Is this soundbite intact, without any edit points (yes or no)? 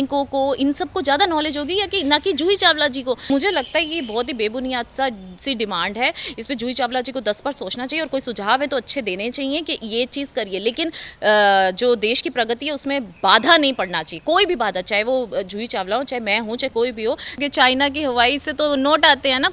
no